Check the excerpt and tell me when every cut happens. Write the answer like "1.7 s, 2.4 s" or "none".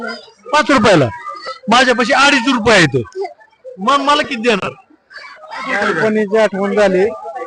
5.8 s